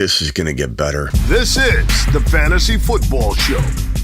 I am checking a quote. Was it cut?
yes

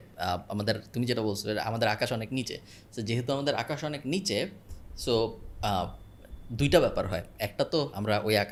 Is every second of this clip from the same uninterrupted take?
yes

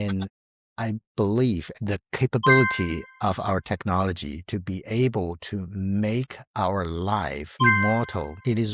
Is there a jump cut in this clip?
yes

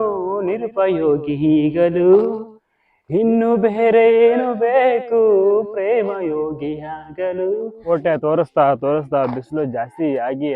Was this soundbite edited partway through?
yes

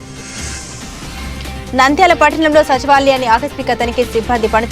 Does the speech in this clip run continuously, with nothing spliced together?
no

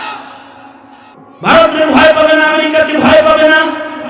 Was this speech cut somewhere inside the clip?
yes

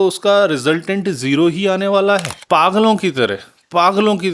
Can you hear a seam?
yes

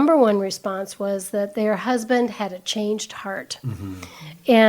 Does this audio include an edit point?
no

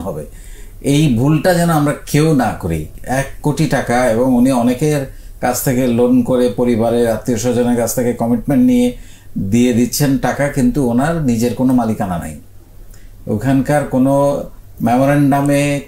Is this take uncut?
no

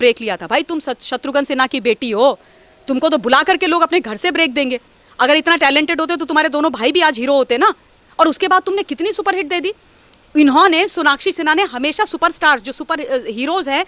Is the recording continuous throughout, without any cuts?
yes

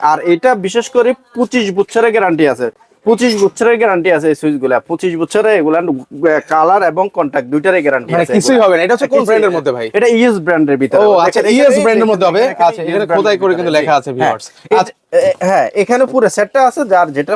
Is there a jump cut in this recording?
no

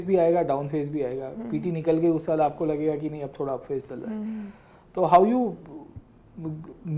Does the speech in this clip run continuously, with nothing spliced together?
yes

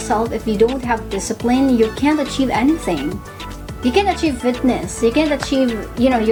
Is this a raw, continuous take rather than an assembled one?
yes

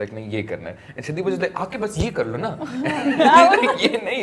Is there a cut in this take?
no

